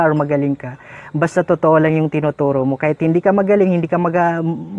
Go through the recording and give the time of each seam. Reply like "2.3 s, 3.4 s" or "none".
none